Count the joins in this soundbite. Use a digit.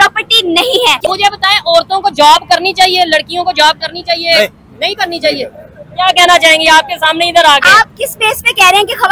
1